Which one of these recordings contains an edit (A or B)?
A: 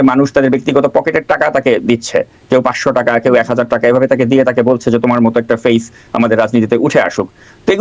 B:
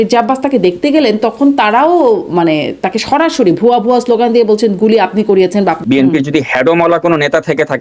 B